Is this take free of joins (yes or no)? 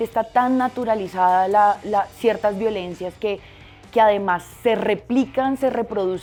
yes